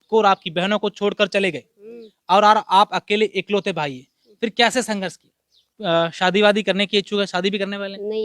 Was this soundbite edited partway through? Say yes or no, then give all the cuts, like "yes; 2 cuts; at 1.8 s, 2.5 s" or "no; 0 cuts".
yes; 1 cut; at 5.7 s